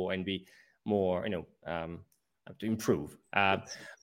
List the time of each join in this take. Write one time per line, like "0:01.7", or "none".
none